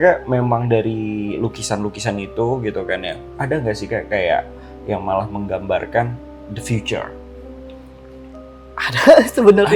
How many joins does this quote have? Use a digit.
1